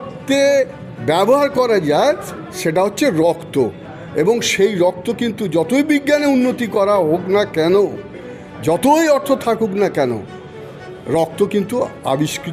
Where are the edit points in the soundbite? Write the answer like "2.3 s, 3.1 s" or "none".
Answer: none